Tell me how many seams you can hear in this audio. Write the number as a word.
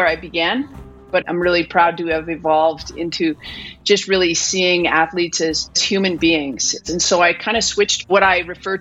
four